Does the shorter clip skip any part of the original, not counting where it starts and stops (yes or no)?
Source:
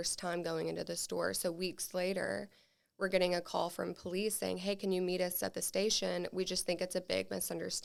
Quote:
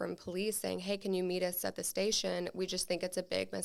no